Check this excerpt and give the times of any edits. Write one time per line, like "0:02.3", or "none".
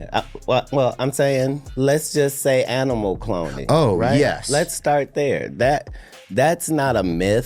0:01.6